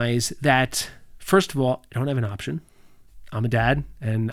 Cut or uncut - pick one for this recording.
uncut